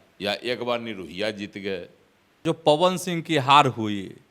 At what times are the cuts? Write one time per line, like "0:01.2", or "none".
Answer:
0:02.3